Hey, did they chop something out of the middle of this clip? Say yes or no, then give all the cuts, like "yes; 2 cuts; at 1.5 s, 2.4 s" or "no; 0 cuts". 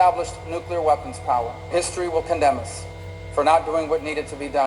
yes; 1 cut; at 1.7 s